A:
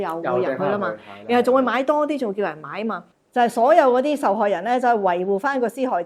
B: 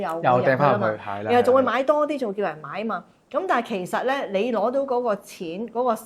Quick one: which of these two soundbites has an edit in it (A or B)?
A